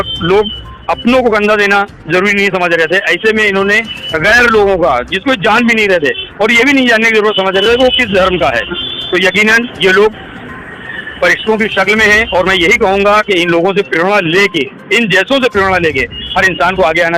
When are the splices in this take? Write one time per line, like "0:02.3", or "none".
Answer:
none